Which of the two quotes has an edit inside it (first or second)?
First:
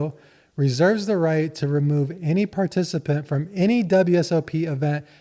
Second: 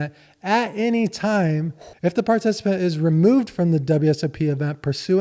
second